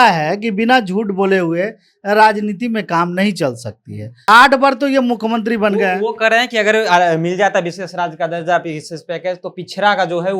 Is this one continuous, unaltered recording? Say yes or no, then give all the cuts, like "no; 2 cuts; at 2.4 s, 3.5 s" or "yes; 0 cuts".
no; 1 cut; at 4.2 s